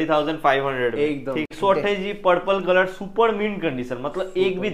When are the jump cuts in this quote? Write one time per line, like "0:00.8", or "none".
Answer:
0:01.5